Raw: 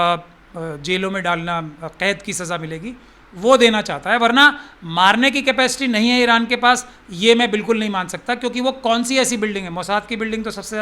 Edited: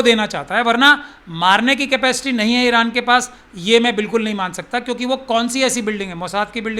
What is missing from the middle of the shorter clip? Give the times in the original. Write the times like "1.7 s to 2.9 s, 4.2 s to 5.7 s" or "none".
none